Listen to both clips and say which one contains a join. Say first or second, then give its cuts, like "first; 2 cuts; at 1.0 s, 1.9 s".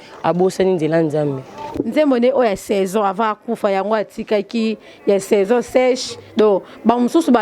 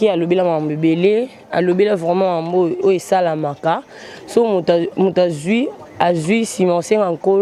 first; 1 cut; at 1.8 s